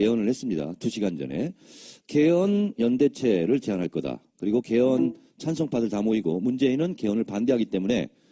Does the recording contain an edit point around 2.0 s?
yes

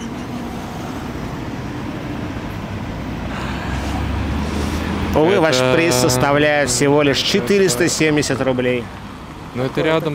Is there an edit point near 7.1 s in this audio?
no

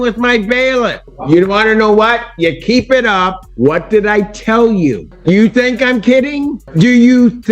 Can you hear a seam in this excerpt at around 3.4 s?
yes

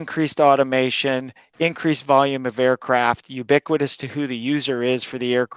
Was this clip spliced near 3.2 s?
no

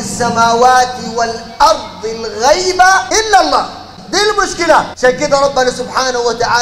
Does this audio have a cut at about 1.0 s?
no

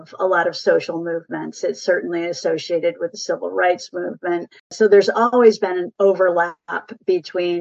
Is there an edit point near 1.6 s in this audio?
no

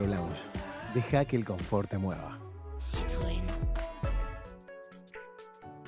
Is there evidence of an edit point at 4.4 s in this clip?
yes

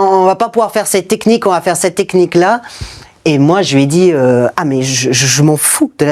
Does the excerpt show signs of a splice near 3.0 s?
no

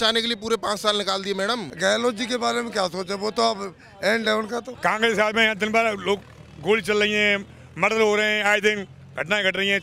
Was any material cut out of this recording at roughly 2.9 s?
no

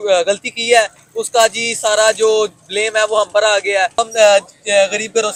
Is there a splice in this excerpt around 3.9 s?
no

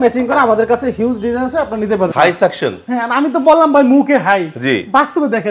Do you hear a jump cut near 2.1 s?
yes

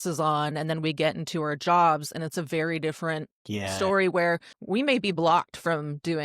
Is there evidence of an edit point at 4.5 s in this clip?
yes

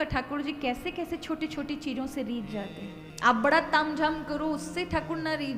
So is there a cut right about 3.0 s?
yes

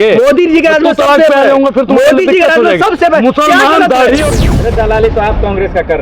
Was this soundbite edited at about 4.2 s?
yes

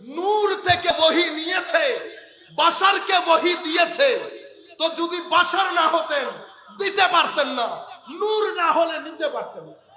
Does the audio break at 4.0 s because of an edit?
no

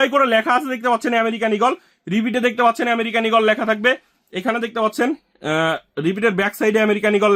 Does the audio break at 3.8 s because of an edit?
no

